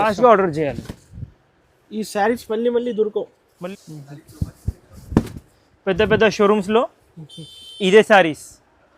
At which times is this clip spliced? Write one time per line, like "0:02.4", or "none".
0:03.5